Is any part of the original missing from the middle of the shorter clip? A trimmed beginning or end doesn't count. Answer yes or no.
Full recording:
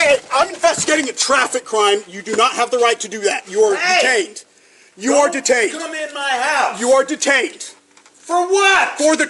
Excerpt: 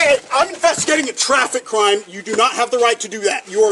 no